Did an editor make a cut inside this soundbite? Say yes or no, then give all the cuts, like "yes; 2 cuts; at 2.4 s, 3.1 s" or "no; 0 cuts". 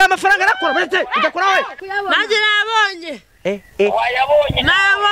yes; 1 cut; at 1.8 s